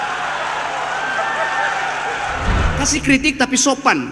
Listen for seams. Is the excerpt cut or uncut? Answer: cut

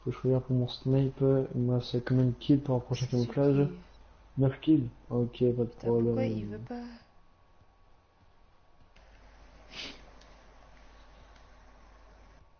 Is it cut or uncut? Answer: uncut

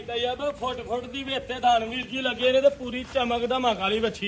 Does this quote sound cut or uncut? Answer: uncut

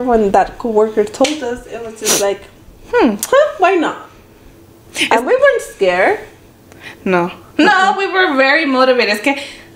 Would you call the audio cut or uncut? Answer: uncut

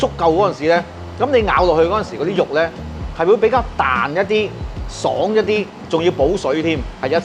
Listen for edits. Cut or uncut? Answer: cut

